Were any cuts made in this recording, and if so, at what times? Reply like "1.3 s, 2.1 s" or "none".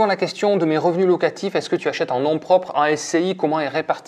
none